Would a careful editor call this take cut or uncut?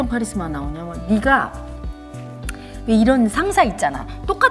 uncut